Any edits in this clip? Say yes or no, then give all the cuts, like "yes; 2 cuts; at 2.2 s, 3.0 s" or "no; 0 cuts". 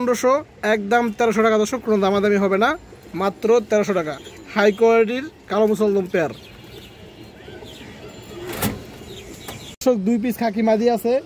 no; 0 cuts